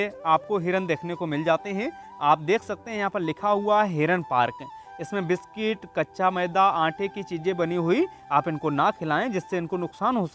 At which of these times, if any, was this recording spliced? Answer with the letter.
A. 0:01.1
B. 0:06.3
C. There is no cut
C